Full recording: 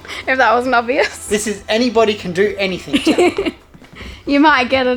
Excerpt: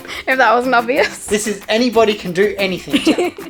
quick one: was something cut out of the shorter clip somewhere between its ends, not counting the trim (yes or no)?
no